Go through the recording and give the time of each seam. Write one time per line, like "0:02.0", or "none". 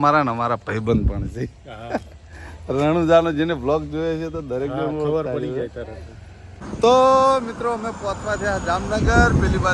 0:06.8